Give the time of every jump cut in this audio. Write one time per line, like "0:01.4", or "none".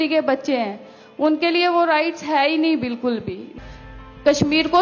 0:03.5